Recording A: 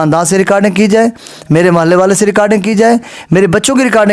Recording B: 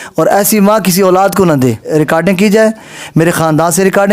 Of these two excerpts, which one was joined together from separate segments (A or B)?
B